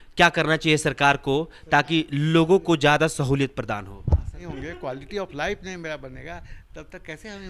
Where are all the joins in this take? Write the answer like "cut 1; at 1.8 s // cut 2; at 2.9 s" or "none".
cut 1; at 4.4 s